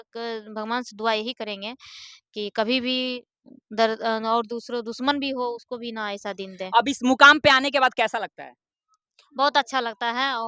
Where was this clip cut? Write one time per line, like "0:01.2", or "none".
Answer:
none